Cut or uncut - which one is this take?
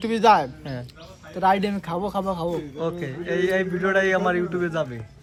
uncut